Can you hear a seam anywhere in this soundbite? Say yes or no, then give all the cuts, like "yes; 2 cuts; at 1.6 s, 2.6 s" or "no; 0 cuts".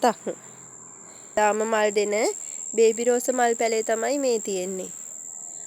yes; 1 cut; at 1.3 s